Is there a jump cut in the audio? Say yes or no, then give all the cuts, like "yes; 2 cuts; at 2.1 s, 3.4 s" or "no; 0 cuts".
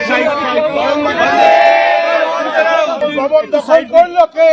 yes; 1 cut; at 3.0 s